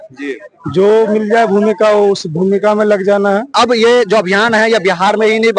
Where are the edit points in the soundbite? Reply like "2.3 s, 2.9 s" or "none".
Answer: 3.5 s